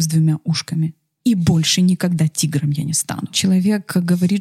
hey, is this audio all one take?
no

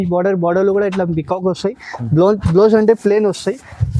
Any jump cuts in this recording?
no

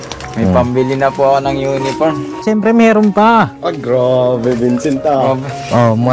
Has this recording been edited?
yes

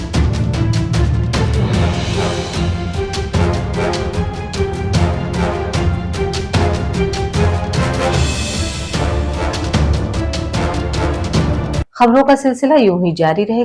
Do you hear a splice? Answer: yes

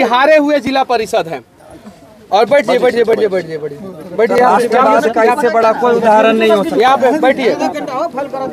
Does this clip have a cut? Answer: no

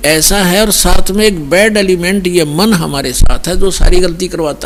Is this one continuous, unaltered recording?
yes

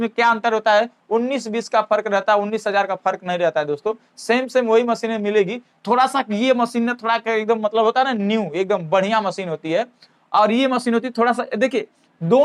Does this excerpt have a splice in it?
no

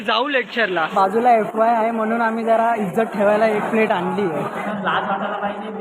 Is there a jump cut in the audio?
yes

